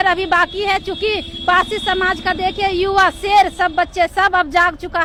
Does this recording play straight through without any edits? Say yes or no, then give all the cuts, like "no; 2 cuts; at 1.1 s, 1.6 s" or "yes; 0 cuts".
yes; 0 cuts